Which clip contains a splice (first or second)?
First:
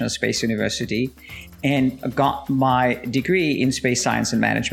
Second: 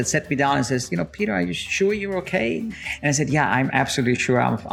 second